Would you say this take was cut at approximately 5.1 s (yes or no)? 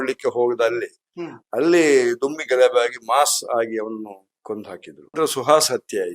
yes